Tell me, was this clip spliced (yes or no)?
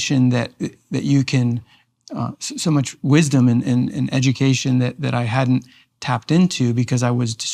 no